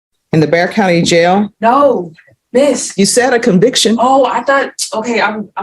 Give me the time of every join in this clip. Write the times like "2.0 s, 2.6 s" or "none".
1.2 s